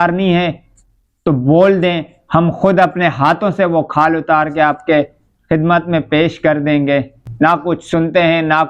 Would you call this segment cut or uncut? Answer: cut